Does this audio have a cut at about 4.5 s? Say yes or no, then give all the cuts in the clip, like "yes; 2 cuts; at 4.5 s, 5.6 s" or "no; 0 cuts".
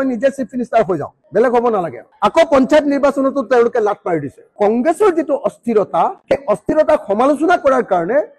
yes; 2 cuts; at 2.0 s, 4.5 s